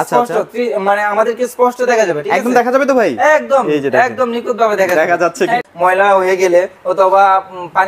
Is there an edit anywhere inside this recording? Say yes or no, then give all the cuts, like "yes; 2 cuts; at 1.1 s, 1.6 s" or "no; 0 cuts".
yes; 1 cut; at 5.6 s